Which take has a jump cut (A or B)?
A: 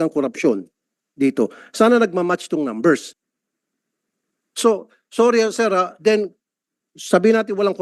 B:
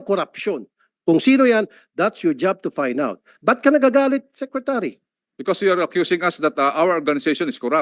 A